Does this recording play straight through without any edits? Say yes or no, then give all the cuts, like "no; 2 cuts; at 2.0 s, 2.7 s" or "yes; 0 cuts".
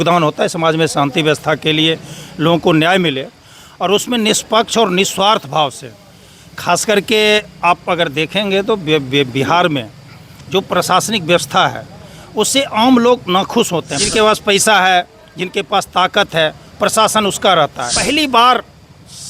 no; 2 cuts; at 14.0 s, 18.2 s